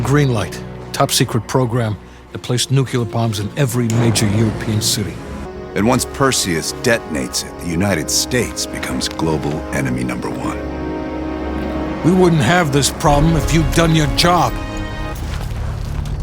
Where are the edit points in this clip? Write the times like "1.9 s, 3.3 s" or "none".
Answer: 5.5 s, 15.0 s